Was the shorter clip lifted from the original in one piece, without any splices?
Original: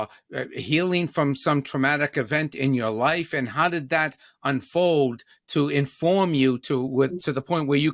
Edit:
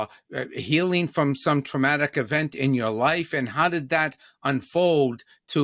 yes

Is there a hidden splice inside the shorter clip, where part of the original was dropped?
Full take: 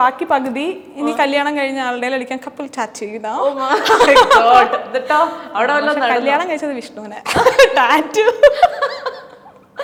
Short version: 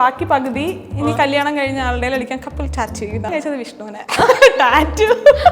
yes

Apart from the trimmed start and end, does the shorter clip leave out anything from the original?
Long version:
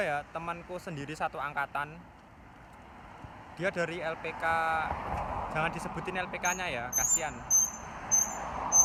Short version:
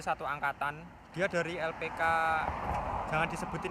yes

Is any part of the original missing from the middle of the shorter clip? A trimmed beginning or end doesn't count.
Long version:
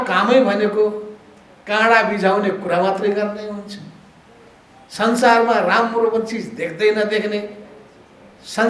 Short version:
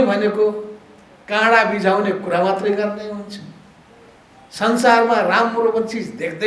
no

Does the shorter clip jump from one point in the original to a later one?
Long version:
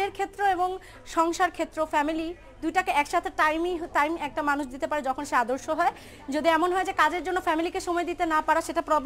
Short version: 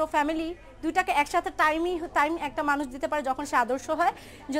no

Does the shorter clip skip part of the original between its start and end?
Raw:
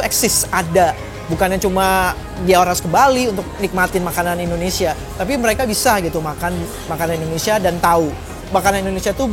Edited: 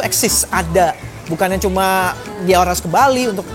no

